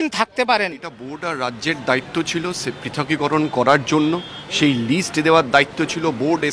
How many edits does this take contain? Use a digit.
1